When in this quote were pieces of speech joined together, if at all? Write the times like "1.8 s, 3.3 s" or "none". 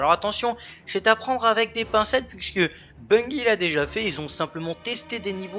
2.9 s